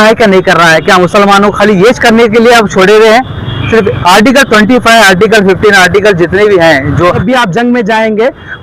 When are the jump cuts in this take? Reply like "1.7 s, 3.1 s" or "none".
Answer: 7.2 s

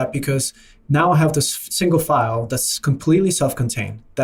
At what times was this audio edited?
none

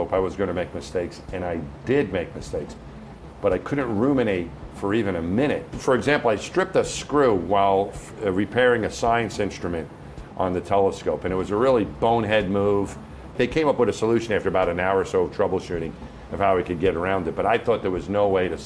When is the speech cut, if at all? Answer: 5.7 s, 13.3 s

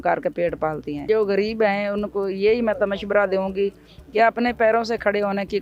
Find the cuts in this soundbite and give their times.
1.1 s

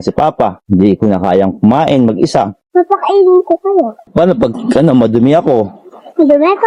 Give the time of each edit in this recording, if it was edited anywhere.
4.1 s

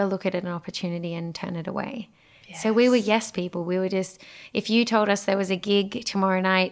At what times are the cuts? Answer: none

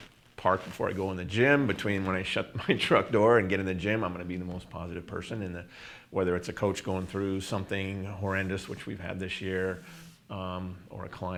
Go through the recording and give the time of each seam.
none

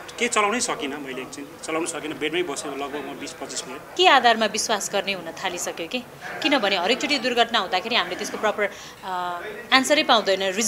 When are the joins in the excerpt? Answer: 3.9 s

